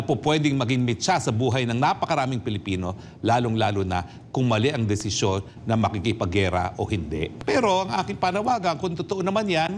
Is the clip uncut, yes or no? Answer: no